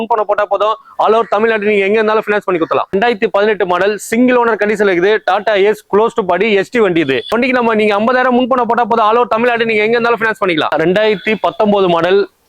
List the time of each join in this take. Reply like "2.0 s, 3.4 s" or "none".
2.9 s, 7.3 s, 10.7 s